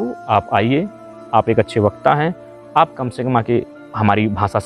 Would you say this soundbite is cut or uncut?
uncut